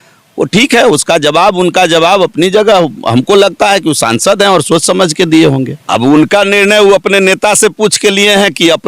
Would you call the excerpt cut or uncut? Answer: cut